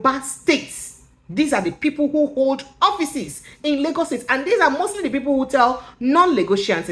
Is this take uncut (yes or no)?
yes